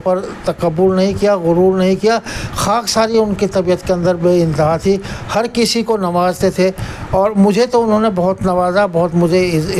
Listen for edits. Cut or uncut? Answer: uncut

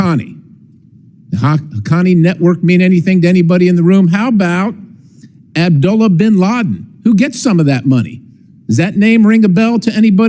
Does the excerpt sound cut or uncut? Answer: uncut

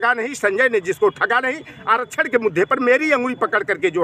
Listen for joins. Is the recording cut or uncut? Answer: uncut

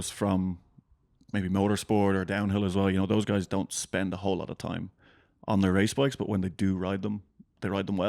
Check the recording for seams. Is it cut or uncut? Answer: uncut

